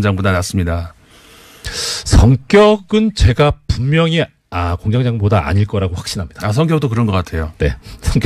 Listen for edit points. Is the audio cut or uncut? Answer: cut